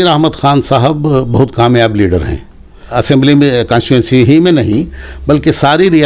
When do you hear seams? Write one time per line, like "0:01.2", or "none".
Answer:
0:02.9